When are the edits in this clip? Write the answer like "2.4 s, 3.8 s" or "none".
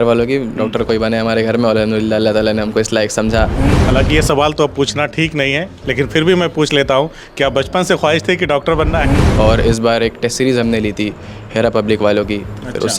3.7 s, 9.2 s